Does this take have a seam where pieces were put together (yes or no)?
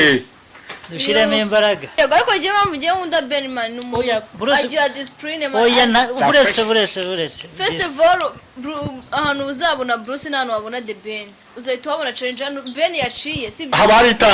yes